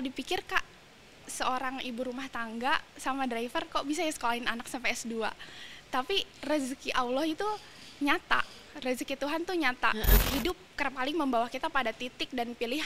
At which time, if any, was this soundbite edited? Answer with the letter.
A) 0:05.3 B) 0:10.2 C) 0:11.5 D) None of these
B